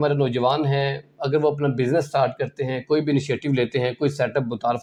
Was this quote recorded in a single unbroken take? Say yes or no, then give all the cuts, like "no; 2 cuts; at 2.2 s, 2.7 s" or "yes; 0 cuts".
yes; 0 cuts